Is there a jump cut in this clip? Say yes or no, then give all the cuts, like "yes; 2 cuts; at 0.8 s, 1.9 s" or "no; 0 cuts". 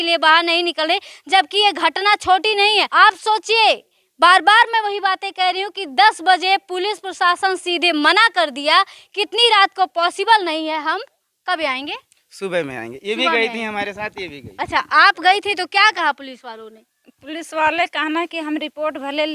yes; 1 cut; at 2.9 s